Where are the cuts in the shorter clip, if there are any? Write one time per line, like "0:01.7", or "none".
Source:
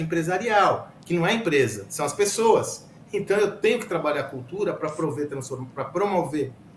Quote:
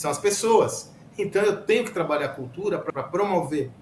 0:02.9